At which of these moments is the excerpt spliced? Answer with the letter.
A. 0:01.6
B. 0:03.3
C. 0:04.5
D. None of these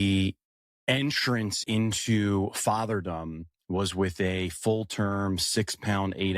A